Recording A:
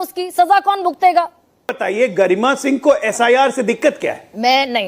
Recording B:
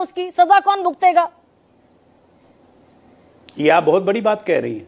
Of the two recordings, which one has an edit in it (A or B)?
A